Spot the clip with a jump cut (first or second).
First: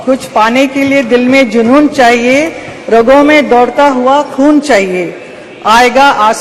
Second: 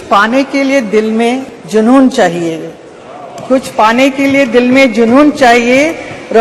second